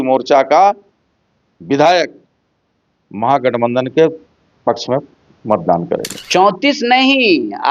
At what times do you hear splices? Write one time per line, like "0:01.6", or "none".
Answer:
0:06.1